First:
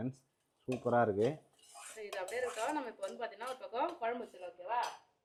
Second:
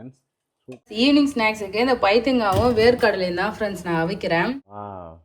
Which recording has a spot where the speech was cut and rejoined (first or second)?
second